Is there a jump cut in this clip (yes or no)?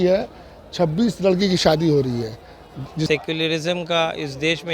yes